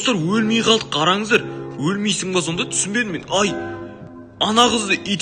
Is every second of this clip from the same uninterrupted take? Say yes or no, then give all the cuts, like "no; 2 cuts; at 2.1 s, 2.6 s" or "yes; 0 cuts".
yes; 0 cuts